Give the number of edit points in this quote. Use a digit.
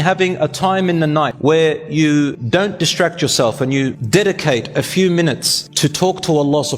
3